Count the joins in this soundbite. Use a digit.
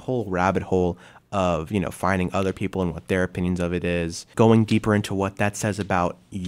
1